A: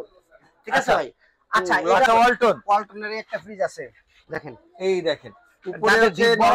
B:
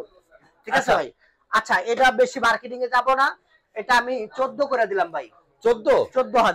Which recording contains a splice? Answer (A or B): A